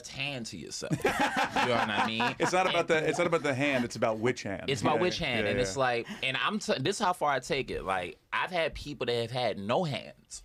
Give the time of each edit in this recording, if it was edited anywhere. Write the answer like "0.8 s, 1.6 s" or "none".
none